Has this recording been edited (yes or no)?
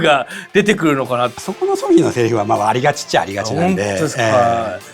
yes